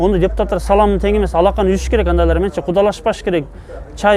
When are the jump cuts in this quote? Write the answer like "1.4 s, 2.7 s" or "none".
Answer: none